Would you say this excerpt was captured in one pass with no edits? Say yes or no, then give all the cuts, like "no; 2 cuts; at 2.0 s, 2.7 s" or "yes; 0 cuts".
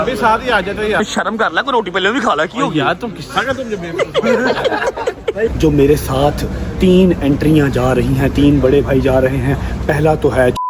no; 2 cuts; at 1.0 s, 5.5 s